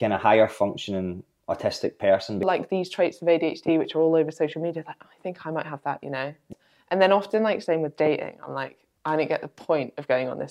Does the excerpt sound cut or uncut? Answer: cut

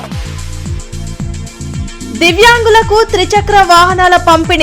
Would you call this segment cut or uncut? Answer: cut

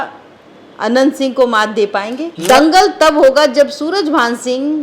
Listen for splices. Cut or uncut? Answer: cut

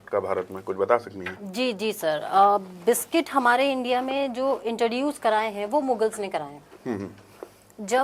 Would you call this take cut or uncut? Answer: uncut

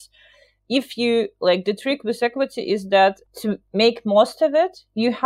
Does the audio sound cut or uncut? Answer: cut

